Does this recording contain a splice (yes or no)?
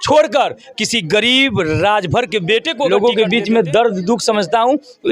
yes